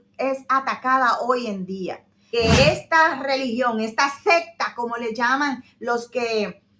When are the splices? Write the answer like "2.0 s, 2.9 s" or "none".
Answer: 2.1 s